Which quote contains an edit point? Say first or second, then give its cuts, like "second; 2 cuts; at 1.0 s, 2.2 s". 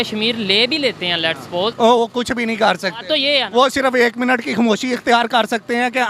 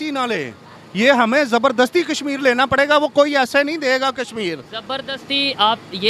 first; 1 cut; at 1.7 s